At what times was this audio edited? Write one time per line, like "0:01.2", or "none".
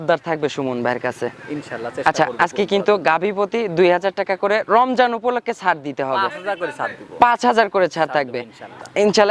none